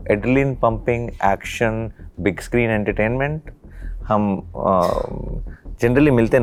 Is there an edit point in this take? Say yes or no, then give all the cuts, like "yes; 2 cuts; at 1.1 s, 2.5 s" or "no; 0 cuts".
no; 0 cuts